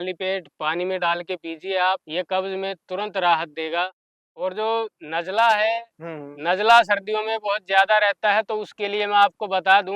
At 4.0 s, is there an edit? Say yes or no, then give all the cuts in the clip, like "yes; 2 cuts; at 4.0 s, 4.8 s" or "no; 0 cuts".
yes; 1 cut; at 4.0 s